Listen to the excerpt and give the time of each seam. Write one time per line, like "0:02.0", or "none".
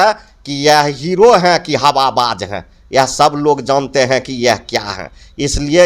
none

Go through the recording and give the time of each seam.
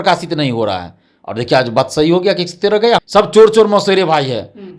0:03.0

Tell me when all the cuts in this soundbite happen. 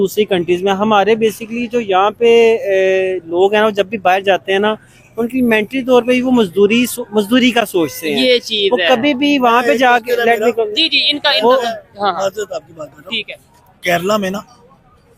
none

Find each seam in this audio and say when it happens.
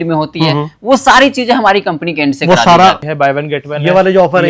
0:03.1

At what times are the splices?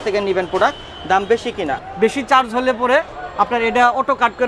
0:01.8

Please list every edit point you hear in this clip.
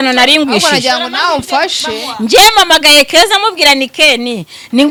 none

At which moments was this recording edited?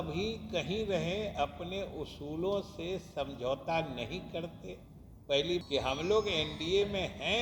0:05.6

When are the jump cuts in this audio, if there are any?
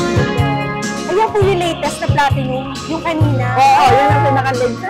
0:01.0

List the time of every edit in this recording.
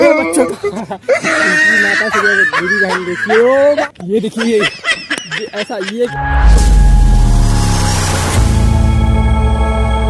0:03.9
0:06.1

